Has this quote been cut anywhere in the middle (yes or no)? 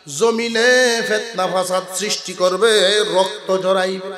no